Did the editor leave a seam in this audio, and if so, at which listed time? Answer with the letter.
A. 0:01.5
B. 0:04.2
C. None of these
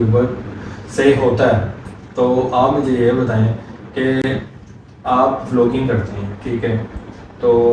C